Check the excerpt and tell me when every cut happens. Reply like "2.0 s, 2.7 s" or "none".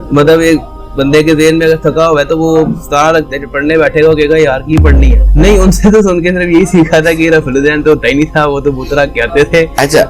5.2 s